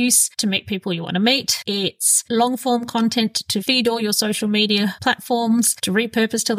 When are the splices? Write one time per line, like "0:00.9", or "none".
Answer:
none